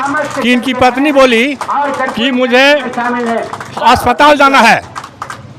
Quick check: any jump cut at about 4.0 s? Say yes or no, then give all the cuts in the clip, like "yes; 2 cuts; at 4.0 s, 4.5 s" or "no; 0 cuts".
no; 0 cuts